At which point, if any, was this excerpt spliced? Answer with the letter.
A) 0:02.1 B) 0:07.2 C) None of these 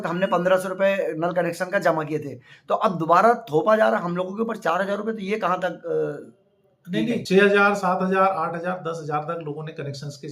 B